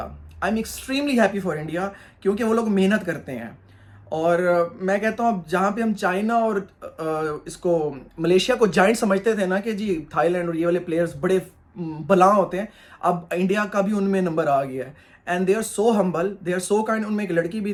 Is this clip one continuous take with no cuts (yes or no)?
yes